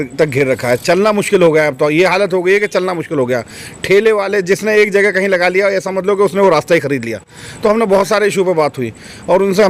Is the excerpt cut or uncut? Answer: uncut